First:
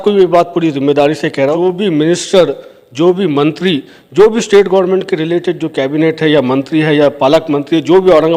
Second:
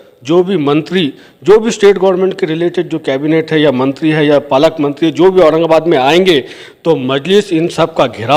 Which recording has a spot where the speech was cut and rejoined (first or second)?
first